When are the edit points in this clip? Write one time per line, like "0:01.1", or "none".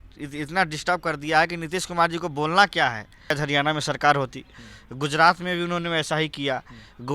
0:03.3